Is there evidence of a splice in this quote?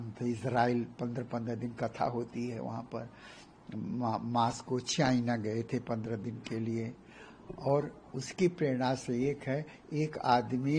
no; 0 cuts

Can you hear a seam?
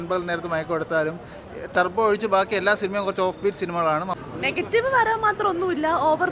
yes; 1 cut; at 4.2 s

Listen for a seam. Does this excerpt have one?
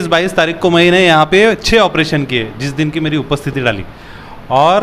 no; 0 cuts

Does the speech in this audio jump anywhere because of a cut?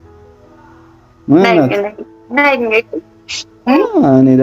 yes; 1 cut; at 1.1 s

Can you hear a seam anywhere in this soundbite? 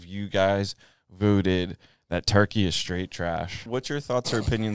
yes; 1 cut; at 3.6 s

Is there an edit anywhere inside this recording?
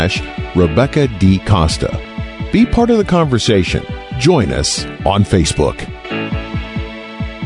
yes; 1 cut; at 5.9 s

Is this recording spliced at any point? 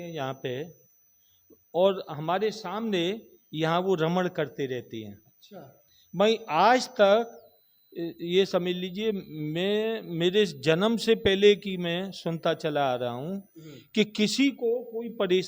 no; 0 cuts

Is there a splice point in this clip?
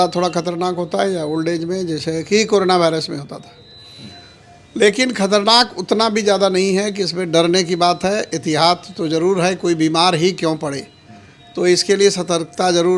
no; 0 cuts

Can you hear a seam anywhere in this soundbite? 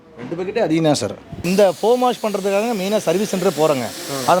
yes; 1 cut; at 1.5 s

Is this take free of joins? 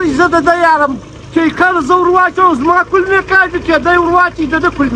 yes; 0 cuts

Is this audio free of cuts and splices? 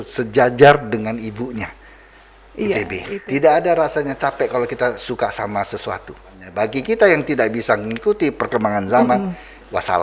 no; 2 cuts; at 3.1 s, 6.4 s

